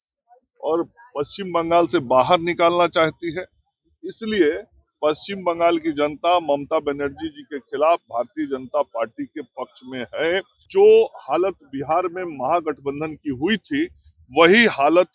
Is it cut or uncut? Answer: cut